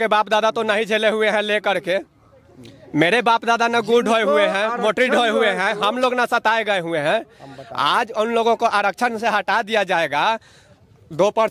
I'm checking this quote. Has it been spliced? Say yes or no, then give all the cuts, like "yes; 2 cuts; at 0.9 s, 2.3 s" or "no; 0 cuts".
no; 0 cuts